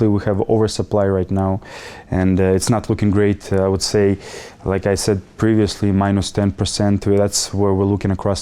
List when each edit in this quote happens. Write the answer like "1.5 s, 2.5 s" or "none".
none